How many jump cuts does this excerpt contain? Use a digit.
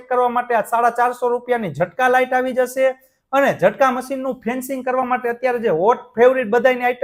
0